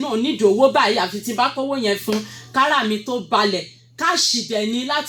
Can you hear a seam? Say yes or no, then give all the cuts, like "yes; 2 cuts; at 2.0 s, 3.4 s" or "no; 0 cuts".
no; 0 cuts